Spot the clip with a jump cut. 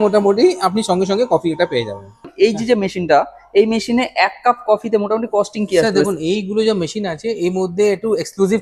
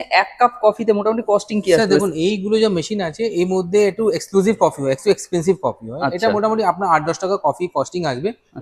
first; 1 cut; at 2.3 s

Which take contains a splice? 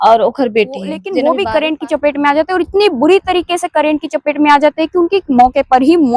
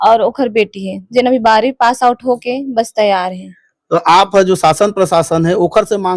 first; 1 cut; at 1.0 s

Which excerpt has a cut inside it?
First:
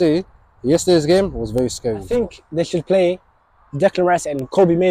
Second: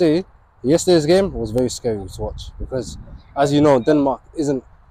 first; 1 cut; at 2.0 s

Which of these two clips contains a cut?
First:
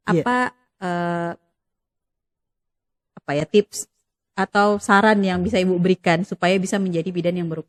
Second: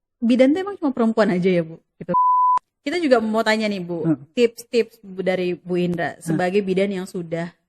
second; 1 cut; at 2.2 s

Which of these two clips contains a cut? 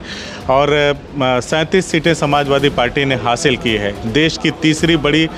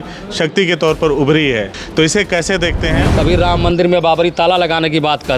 second; 2 cuts; at 1.8 s, 3.0 s

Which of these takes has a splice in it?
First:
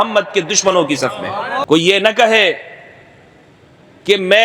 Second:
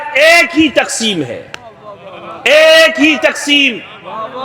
first; 1 cut; at 1.6 s

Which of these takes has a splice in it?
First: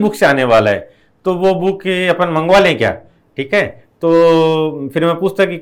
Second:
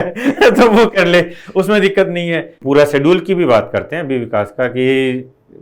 second; 1 cut; at 2.5 s

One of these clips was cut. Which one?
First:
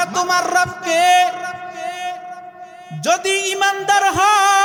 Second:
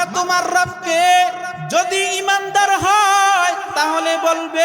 second; 1 cut; at 1.5 s

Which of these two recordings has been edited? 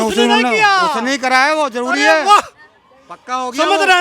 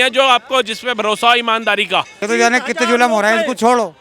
second; 1 cut; at 2.2 s

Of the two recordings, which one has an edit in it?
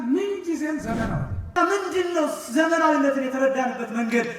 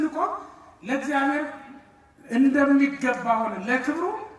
first; 1 cut; at 1.5 s

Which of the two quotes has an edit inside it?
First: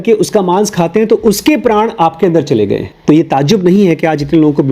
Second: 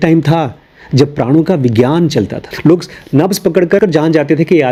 first; 1 cut; at 2.9 s

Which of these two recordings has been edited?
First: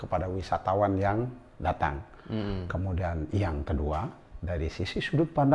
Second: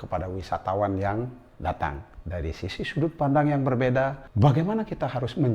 second; 2 cuts; at 2.1 s, 4.2 s

